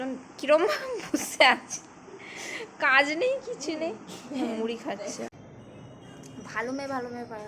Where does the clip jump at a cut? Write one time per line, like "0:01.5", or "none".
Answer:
0:05.4